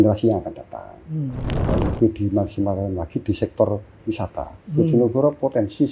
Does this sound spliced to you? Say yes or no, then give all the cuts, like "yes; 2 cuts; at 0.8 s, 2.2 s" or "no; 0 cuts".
yes; 1 cut; at 1.7 s